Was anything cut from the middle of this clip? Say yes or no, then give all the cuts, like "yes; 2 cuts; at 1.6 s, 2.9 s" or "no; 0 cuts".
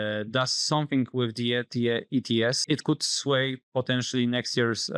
yes; 1 cut; at 2.6 s